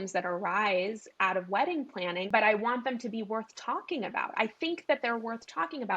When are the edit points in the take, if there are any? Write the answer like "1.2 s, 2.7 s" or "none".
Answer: 2.3 s